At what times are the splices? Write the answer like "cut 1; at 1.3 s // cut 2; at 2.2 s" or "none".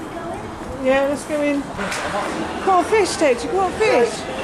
cut 1; at 2.2 s